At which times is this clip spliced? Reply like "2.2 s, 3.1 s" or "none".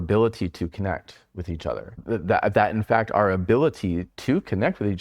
2.0 s